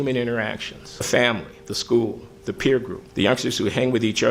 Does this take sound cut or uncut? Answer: cut